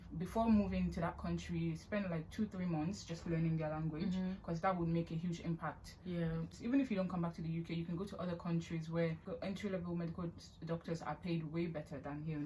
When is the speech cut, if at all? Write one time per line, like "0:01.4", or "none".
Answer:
0:06.5
0:09.3